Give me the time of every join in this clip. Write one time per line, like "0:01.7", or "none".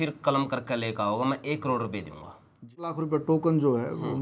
0:03.0